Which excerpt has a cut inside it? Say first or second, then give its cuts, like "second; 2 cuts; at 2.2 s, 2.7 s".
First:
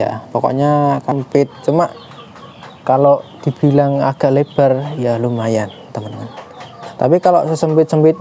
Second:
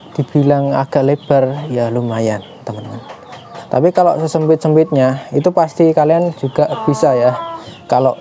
first; 1 cut; at 1.1 s